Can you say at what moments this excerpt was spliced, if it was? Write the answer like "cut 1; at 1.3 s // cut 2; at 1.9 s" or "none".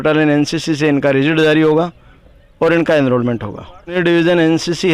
cut 1; at 3.9 s

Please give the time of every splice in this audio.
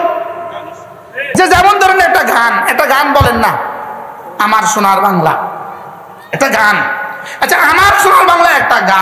cut 1; at 1.4 s

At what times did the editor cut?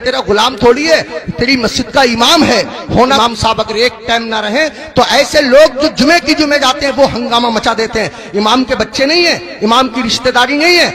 cut 1; at 3.2 s

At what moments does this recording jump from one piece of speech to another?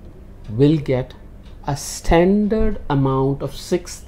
none

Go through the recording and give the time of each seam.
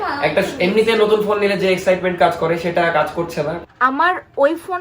cut 1; at 3.6 s

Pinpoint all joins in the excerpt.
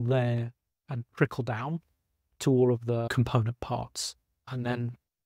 cut 1; at 3.2 s // cut 2; at 4.5 s

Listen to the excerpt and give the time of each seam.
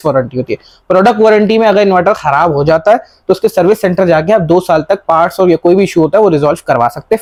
none

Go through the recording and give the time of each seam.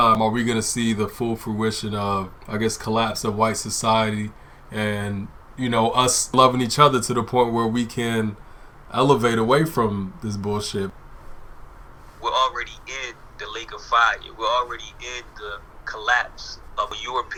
none

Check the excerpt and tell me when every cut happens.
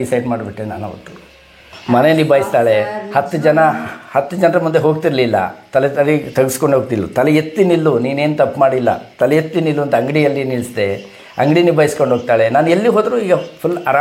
cut 1; at 1.7 s

